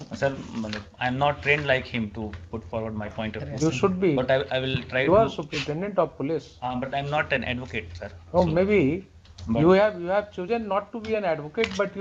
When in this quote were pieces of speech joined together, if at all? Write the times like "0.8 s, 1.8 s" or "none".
none

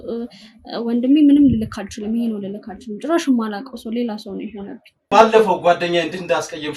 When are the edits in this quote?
5.1 s

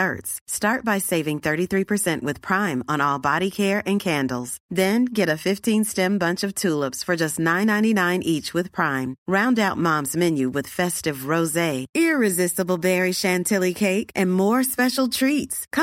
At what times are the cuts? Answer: none

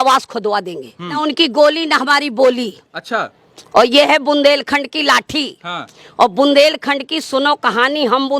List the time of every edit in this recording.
1.2 s

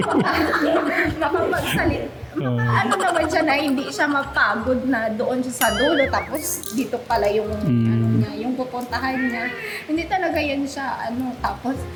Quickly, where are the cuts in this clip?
none

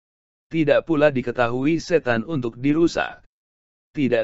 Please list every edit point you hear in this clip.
none

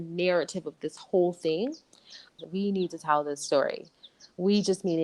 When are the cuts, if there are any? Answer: 2.4 s

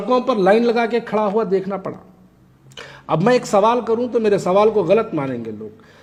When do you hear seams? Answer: none

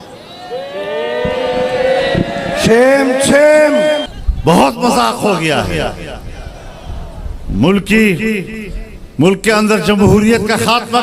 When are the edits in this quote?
4.1 s

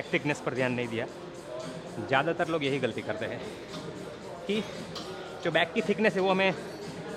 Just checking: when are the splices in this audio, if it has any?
none

